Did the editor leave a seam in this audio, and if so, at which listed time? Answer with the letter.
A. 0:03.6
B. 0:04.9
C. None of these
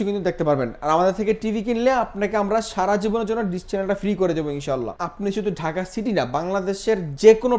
B